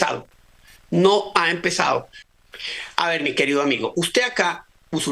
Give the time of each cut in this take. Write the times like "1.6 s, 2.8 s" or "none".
2.2 s